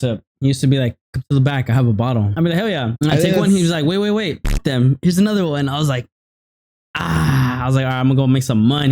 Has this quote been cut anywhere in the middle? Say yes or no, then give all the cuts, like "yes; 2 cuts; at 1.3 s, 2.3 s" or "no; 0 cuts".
yes; 2 cuts; at 2.8 s, 4.6 s